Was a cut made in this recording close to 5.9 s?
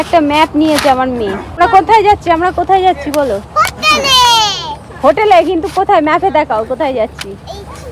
no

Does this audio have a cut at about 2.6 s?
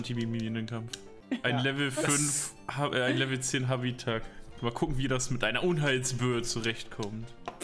no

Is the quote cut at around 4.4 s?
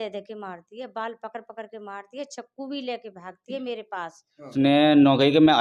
yes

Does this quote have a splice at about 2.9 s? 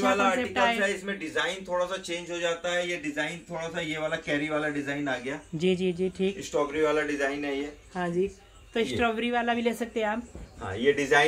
no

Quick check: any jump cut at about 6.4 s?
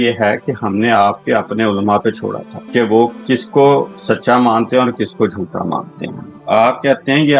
no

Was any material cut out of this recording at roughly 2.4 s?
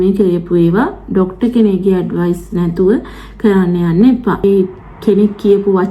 no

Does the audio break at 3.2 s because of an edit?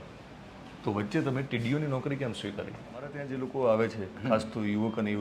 yes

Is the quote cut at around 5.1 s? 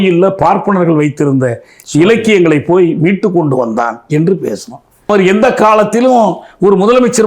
yes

